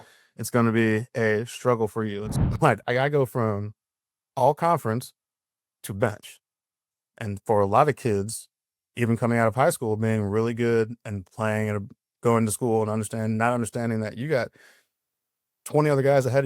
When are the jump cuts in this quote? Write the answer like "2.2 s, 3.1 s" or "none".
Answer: 2.3 s